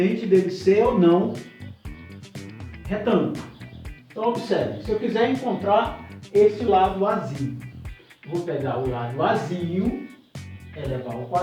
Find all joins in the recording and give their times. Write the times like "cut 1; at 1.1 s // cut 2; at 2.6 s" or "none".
cut 1; at 1.5 s // cut 2; at 2.8 s